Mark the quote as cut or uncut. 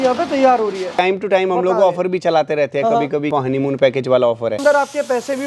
cut